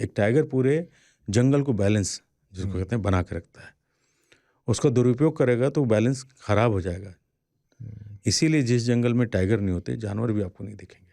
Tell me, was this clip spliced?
no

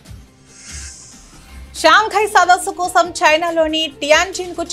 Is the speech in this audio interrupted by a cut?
yes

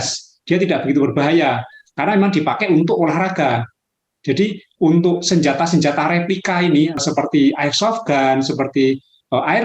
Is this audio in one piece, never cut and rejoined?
no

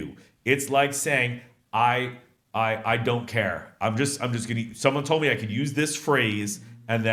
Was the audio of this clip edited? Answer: no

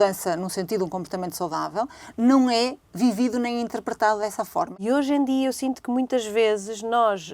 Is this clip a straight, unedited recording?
no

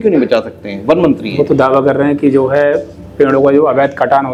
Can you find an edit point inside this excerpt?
no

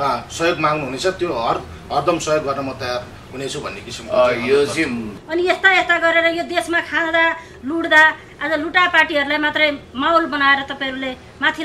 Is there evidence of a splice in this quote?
yes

